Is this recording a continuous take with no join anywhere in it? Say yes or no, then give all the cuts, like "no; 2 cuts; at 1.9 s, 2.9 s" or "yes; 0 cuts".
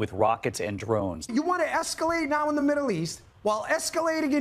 no; 1 cut; at 1.2 s